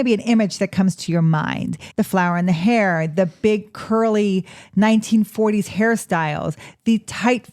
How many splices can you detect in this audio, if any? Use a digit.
1